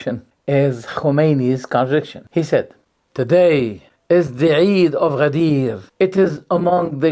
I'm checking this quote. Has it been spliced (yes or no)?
yes